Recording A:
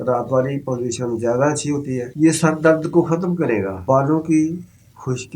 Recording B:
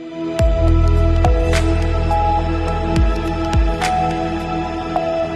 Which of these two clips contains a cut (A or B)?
A